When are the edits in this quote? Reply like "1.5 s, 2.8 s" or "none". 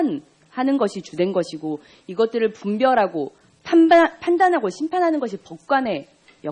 none